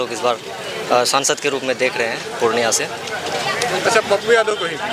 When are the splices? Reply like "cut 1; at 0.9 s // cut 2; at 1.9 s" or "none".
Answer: none